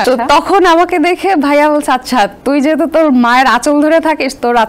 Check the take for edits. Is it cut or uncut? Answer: uncut